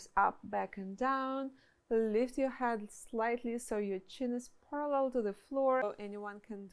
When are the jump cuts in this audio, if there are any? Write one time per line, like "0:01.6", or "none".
0:05.8